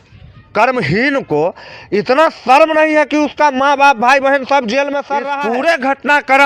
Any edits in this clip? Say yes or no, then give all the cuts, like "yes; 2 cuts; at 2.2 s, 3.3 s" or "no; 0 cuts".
yes; 1 cut; at 5.3 s